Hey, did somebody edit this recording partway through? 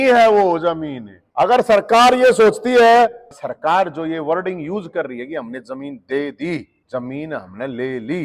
yes; 1 cut; at 3.3 s

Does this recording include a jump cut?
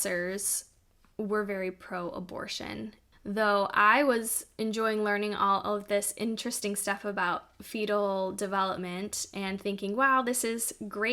yes; 1 cut; at 3.0 s

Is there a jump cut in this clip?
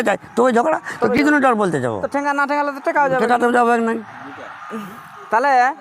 no; 0 cuts

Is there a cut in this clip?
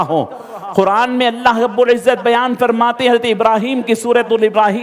no; 0 cuts

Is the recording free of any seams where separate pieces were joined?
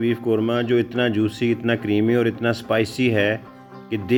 yes; 0 cuts

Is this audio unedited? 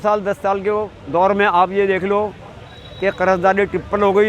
yes; 0 cuts

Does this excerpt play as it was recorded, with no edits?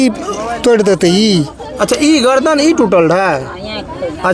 yes; 0 cuts

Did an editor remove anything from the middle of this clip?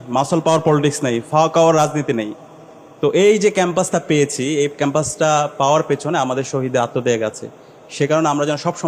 no; 0 cuts

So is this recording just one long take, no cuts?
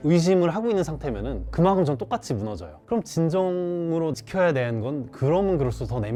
yes; 0 cuts

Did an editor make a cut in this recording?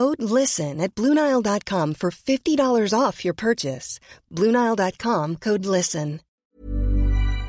yes; 1 cut; at 6.4 s

